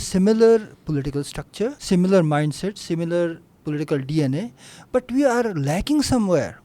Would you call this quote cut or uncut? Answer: cut